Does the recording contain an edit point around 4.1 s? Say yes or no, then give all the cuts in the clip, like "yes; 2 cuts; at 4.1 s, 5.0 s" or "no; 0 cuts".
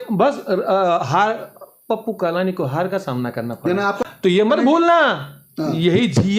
yes; 1 cut; at 4.1 s